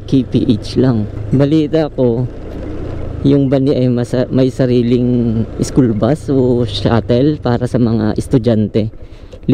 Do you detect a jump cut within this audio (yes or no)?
yes